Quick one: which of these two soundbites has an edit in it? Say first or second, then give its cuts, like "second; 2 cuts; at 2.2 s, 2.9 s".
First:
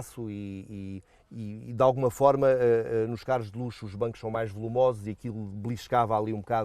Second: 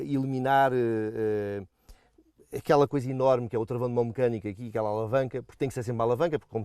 first; 1 cut; at 1.6 s